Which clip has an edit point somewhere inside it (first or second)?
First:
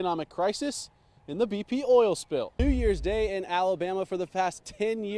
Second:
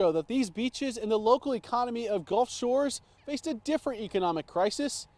first